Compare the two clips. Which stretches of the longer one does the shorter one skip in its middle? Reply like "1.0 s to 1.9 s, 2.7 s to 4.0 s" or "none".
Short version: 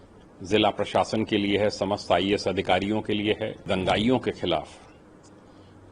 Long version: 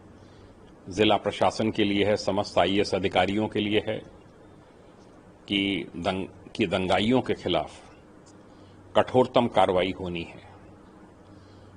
4.1 s to 6.7 s